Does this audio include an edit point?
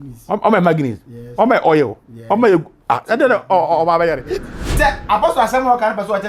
yes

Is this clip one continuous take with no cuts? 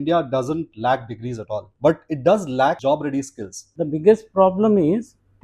no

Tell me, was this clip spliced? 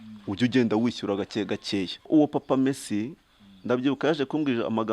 yes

